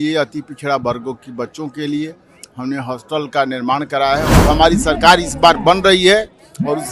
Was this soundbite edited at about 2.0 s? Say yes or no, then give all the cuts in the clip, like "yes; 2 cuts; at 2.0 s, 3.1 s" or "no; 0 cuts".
no; 1 cut; at 4.4 s